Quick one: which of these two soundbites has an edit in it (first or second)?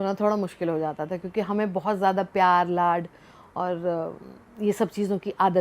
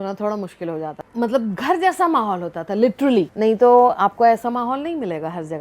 second